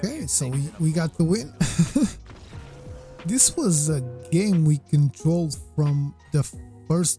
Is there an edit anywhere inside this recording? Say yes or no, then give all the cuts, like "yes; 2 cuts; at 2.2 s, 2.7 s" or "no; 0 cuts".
yes; 1 cut; at 6.2 s